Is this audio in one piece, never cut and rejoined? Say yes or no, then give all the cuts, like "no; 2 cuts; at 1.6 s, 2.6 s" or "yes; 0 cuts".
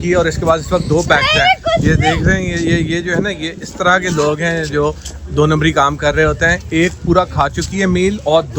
yes; 0 cuts